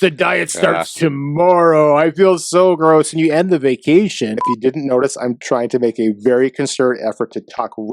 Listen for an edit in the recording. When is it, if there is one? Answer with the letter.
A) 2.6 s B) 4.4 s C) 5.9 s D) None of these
B